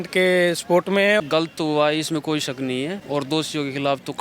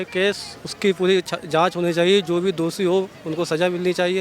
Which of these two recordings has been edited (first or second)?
first